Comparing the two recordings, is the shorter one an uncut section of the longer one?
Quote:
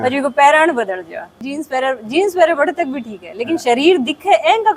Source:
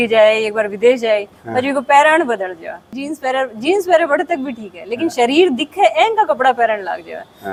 yes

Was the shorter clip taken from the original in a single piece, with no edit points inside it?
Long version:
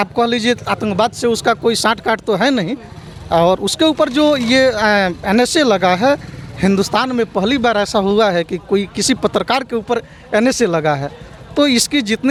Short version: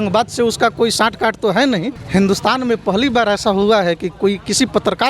no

